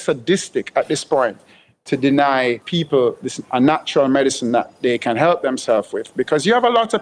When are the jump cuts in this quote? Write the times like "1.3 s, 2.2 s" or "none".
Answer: 2.6 s

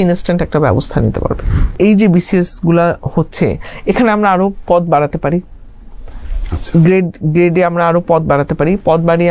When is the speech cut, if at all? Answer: 1.7 s

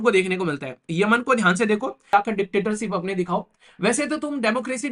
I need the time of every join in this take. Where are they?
2.1 s

